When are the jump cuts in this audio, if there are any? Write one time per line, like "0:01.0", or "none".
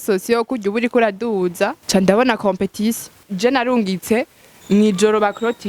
0:01.8
0:03.2